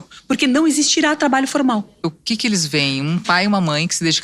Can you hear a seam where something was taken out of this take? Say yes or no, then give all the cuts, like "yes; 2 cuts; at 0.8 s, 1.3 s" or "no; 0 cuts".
yes; 1 cut; at 2.0 s